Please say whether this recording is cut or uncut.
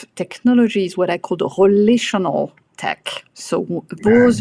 uncut